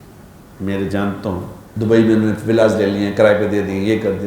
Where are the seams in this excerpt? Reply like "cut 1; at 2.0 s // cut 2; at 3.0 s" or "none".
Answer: cut 1; at 1.6 s